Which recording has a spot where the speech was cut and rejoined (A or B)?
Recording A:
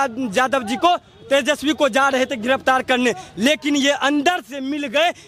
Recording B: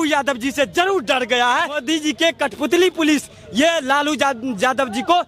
B